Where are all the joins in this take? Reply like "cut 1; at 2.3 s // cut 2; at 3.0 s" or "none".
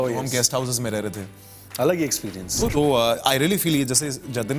cut 1; at 2.7 s